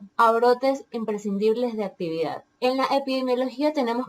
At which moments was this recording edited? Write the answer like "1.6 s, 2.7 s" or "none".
2.4 s